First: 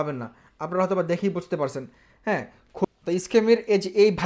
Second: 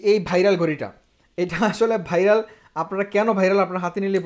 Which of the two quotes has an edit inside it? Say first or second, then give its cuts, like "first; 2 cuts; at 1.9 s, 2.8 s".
first; 1 cut; at 2.9 s